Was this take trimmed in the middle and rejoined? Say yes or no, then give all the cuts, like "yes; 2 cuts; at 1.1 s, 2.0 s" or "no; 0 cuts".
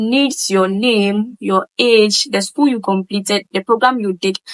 no; 0 cuts